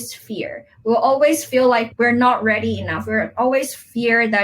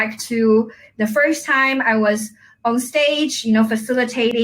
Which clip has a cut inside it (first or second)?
first